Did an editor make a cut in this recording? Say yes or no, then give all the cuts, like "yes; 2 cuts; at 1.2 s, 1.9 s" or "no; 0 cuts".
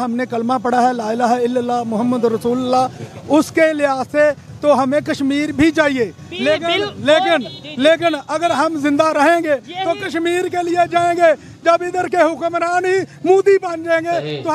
no; 0 cuts